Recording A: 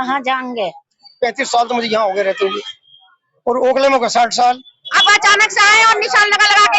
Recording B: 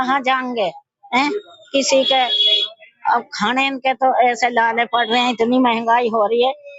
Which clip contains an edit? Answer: A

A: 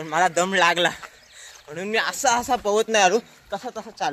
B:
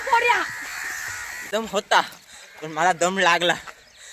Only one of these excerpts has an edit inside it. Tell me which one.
B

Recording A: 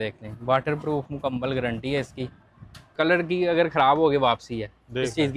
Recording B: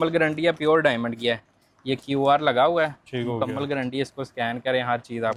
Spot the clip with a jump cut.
A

